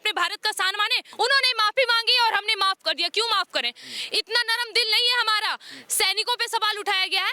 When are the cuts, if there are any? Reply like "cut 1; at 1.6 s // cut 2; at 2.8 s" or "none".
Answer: cut 1; at 1.1 s